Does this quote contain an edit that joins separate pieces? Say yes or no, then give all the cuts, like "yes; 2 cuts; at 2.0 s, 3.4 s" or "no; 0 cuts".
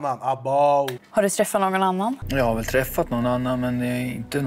yes; 2 cuts; at 1.0 s, 2.2 s